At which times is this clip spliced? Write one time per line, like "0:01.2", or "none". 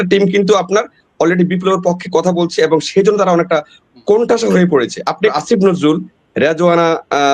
0:05.3